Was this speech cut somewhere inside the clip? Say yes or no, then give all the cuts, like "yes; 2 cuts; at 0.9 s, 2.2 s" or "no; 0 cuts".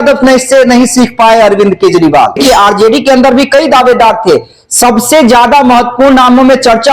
yes; 1 cut; at 2.4 s